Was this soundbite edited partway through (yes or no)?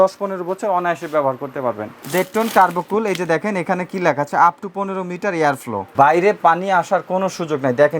yes